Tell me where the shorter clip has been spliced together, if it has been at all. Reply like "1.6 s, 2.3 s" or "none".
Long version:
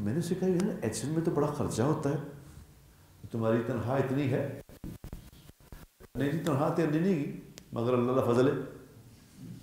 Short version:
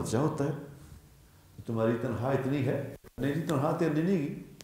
3.0 s